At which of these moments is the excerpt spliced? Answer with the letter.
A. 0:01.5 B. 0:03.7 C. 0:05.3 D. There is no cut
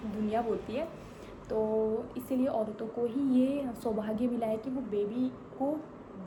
D